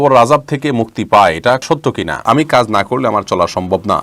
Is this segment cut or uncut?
cut